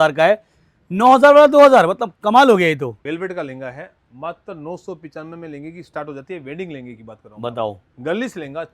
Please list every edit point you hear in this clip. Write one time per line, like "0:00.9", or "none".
0:03.0
0:07.9